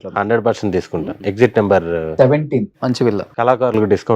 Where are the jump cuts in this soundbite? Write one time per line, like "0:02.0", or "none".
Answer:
0:01.1
0:03.3